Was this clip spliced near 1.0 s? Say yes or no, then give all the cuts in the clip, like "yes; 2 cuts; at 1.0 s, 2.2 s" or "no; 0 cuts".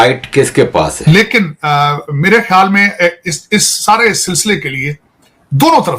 yes; 1 cut; at 1.0 s